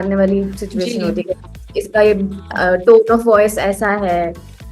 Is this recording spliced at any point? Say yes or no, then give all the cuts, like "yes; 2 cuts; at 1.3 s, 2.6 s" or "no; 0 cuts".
no; 0 cuts